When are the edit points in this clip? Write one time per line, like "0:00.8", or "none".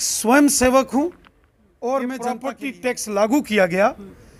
0:02.7